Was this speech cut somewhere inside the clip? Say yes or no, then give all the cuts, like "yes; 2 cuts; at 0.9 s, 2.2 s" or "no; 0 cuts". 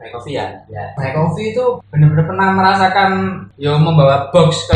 yes; 2 cuts; at 0.9 s, 3.4 s